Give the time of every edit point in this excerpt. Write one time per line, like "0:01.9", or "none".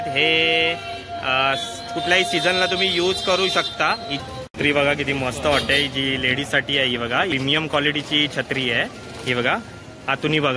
0:04.1
0:07.3